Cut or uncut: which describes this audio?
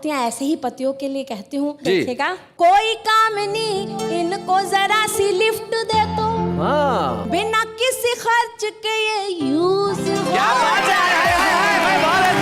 cut